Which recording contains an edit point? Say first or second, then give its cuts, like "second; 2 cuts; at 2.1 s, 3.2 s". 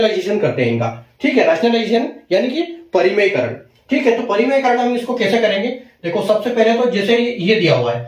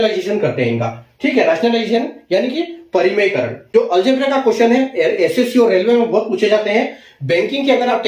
second; 1 cut; at 3.6 s